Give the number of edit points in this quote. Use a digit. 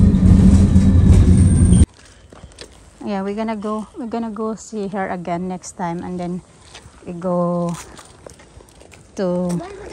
0